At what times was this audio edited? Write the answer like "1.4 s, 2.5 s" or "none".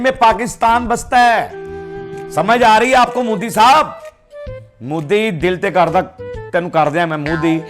none